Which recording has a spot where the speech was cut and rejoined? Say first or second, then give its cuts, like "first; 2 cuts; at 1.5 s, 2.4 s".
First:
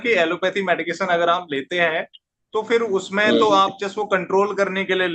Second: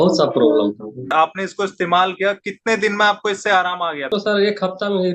second; 2 cuts; at 1.1 s, 4.1 s